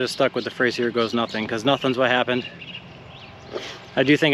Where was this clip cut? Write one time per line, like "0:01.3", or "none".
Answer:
none